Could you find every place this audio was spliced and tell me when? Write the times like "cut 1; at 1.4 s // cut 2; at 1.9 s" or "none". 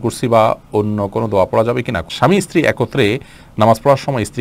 cut 1; at 2.1 s